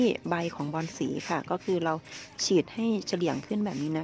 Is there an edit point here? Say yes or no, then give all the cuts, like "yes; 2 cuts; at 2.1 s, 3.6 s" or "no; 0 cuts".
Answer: no; 0 cuts